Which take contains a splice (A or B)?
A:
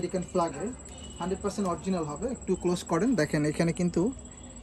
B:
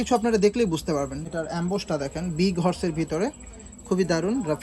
B